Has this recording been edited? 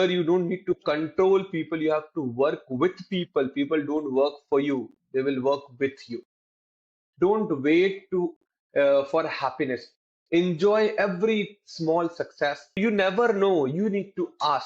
yes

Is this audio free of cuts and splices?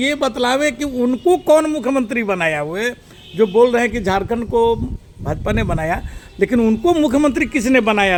yes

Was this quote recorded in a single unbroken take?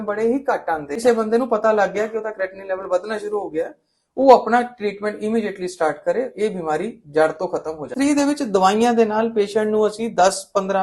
no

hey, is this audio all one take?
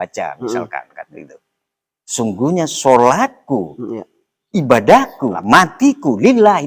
no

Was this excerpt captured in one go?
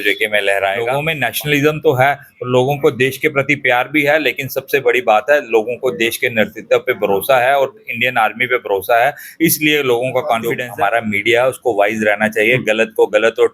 no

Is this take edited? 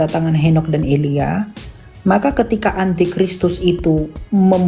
no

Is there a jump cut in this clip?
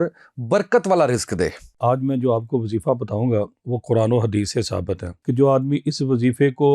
yes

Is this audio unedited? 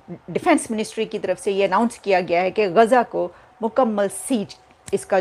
yes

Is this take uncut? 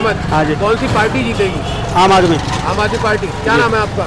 yes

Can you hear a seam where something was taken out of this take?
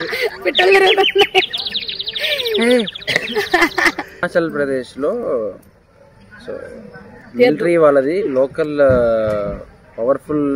yes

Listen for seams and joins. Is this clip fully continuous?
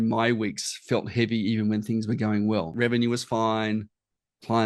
no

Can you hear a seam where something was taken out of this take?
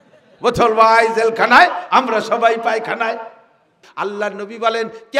yes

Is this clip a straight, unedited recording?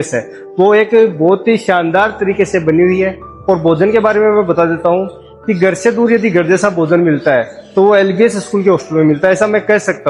yes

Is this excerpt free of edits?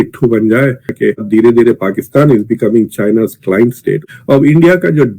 no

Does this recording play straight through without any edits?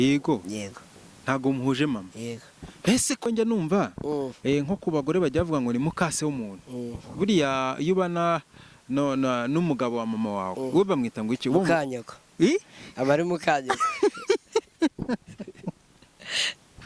no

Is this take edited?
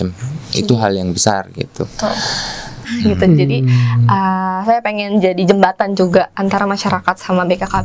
yes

